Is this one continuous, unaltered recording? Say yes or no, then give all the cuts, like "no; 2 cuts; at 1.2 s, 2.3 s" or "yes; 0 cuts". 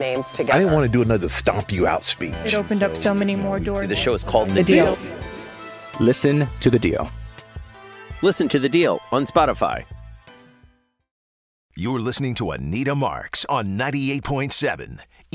no; 1 cut; at 11.6 s